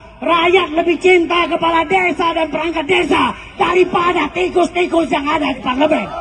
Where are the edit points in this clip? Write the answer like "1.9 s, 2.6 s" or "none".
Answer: none